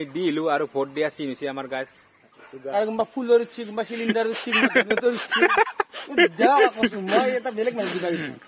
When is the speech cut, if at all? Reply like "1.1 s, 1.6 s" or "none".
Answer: 2.6 s